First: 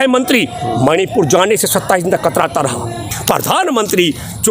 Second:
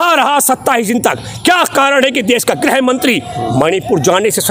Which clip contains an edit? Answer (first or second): first